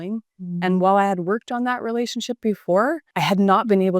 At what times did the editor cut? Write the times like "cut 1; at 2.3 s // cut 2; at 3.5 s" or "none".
cut 1; at 3.1 s